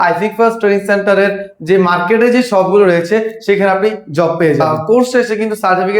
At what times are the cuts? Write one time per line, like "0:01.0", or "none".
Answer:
0:04.6